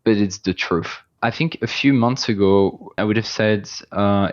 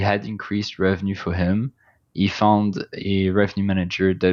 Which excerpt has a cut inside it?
first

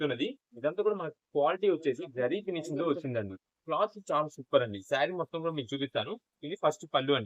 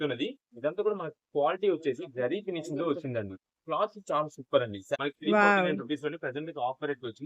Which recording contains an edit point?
second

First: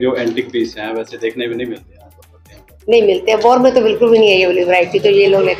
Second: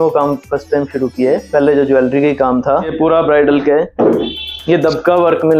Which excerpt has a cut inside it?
second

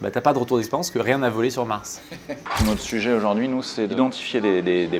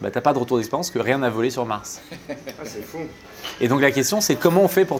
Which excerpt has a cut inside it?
first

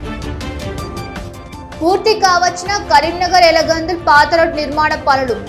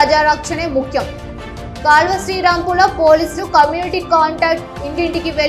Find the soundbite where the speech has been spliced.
first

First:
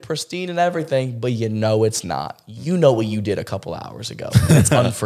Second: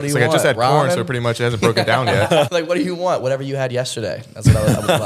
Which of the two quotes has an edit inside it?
second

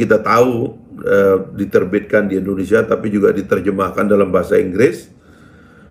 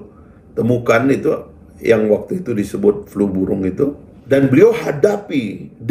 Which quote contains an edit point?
second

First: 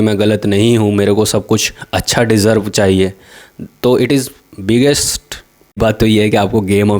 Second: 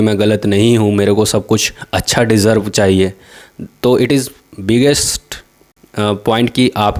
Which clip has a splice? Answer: first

